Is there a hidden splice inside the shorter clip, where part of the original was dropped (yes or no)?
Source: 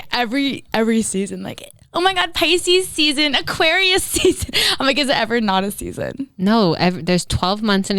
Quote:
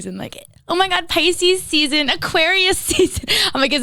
no